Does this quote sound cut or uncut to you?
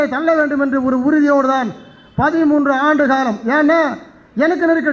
uncut